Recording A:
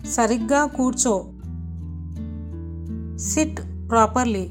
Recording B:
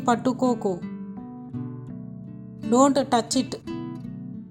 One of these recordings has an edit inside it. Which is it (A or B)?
B